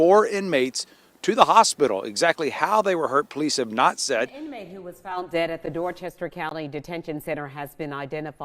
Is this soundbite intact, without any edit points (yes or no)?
no